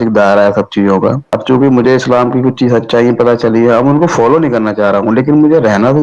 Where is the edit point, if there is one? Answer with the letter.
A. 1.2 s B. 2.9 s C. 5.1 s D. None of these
D